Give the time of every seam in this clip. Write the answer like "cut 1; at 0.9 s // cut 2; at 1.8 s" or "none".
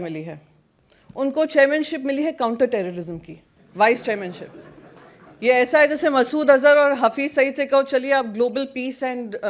none